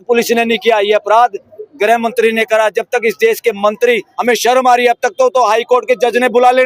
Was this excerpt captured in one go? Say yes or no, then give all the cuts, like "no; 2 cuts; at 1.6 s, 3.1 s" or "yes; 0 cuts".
no; 1 cut; at 4.1 s